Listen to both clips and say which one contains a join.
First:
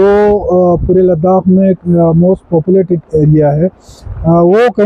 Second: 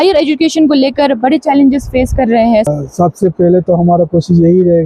second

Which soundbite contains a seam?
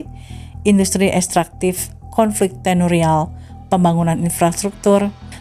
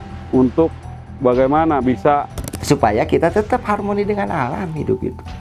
second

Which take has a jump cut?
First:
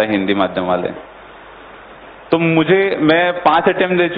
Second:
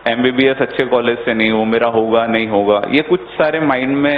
second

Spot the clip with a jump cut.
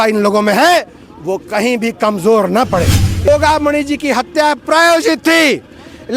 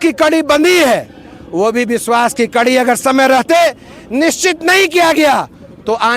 first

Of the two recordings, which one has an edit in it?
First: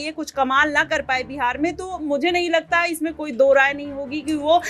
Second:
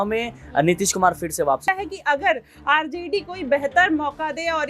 second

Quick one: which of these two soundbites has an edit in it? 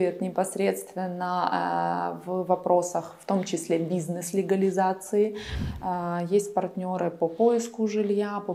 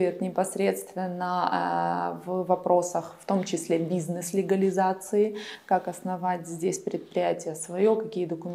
first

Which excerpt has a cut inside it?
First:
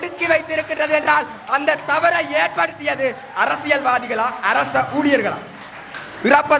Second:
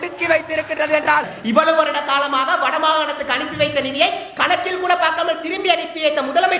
second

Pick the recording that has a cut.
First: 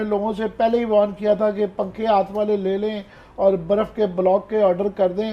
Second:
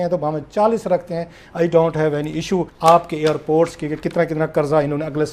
second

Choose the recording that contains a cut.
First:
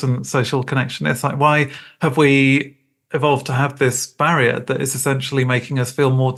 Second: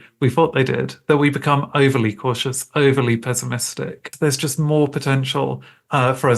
second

